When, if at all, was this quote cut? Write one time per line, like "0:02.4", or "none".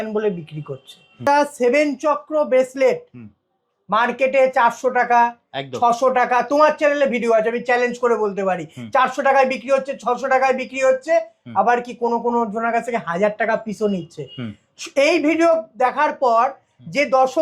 0:01.2